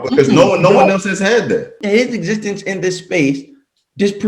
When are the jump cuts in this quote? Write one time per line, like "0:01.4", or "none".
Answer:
0:01.8